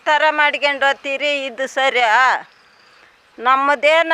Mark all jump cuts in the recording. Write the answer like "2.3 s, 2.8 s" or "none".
none